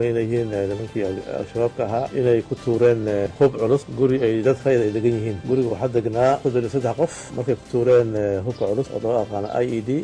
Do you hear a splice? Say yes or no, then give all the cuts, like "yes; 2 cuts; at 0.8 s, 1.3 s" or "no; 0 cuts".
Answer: yes; 2 cuts; at 3.3 s, 7.3 s